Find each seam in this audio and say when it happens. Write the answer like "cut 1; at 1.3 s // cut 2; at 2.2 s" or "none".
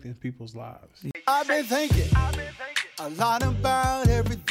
cut 1; at 1.1 s